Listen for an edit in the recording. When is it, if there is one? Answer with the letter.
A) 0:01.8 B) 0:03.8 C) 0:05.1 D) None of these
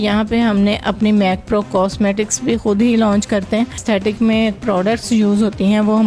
B